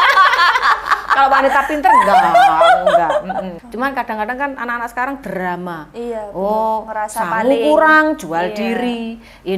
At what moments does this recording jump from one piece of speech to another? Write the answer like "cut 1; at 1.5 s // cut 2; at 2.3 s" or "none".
cut 1; at 3.6 s